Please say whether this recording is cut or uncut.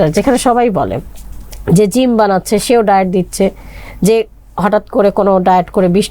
uncut